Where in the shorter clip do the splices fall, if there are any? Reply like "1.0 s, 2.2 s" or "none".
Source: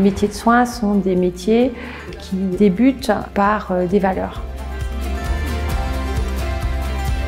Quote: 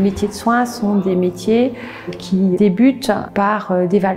none